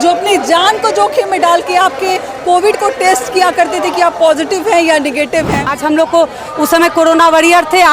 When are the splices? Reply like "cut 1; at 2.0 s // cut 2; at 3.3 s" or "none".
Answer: cut 1; at 5.8 s